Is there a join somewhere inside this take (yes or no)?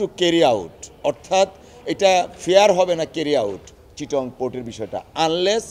no